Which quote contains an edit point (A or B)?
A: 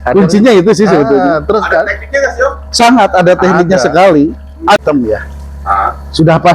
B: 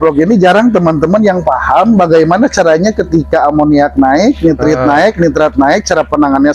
A